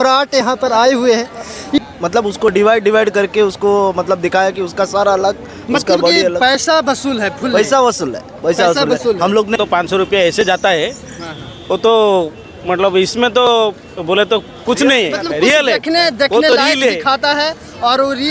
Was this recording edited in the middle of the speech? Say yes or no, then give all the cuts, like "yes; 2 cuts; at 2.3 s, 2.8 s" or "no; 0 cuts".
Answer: yes; 2 cuts; at 1.8 s, 9.5 s